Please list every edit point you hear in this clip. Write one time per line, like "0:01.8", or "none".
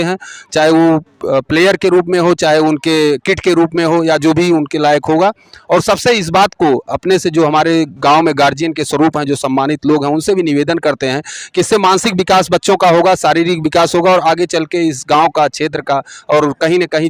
none